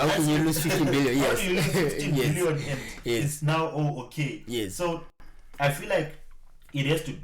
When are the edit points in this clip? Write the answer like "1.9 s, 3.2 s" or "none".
none